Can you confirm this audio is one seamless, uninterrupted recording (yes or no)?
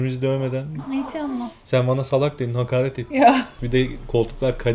no